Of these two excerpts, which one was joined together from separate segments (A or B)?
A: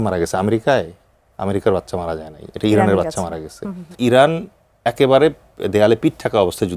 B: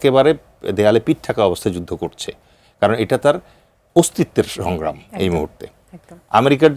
A